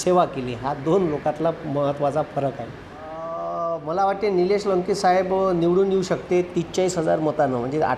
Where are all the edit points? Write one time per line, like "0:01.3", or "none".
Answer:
0:03.3